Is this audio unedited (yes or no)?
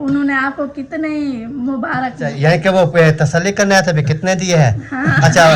no